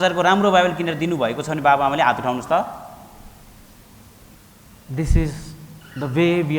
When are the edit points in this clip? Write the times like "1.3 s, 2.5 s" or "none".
4.3 s